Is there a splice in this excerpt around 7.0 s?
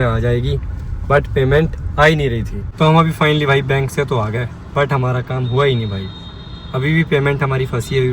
no; 1 cut; at 2.6 s

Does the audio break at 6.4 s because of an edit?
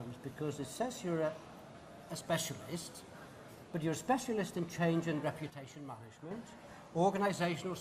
yes; 1 cut; at 6.4 s

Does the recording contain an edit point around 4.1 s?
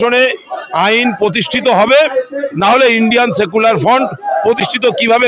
no; 0 cuts

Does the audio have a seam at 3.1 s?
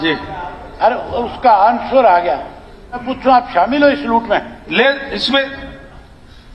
yes; 1 cut; at 3.1 s

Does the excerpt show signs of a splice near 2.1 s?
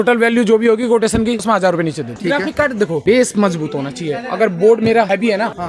yes; 1 cut; at 2.1 s

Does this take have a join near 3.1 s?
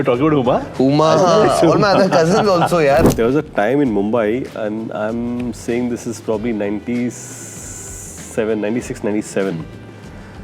yes; 1 cut; at 3.1 s

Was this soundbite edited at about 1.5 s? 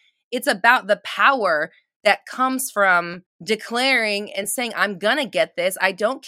no; 1 cut; at 3.2 s

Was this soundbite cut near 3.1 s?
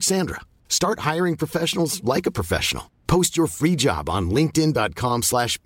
no; 0 cuts

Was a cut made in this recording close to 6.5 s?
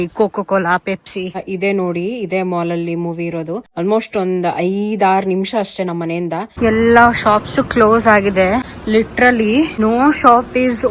yes; 4 cuts; at 1.4 s, 6.5 s, 8.7 s, 9.7 s

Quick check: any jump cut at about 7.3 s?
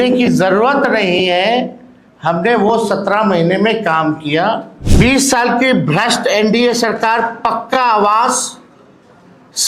no; 1 cut; at 4.8 s

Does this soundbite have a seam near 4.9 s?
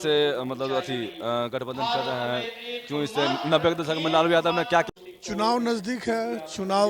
yes; 1 cut; at 4.9 s

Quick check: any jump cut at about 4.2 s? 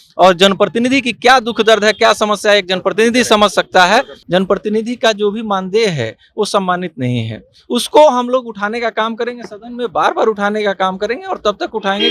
yes; 1 cut; at 4.2 s

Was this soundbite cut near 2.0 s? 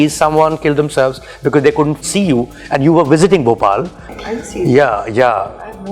yes; 2 cuts; at 2.0 s, 4.0 s

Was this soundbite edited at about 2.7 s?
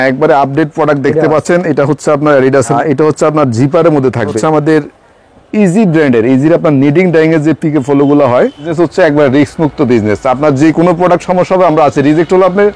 yes; 3 cuts; at 2.7 s, 4.4 s, 8.7 s

